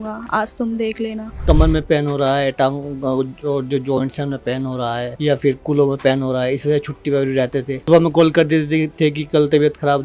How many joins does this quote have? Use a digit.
3